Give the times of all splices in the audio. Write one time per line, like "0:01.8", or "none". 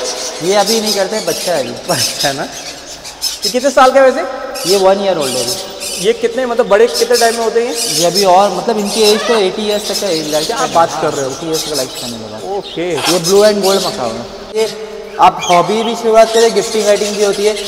0:14.6